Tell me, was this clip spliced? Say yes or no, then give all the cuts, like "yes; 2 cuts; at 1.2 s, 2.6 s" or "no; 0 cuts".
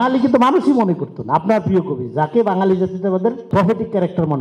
yes; 1 cut; at 3.5 s